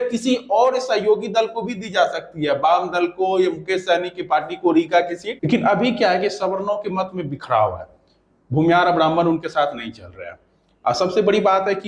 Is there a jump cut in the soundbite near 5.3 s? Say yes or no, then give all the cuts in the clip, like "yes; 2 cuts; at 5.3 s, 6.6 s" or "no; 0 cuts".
yes; 1 cut; at 5.3 s